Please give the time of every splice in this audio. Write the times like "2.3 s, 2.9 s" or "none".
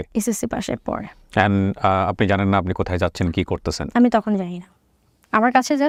none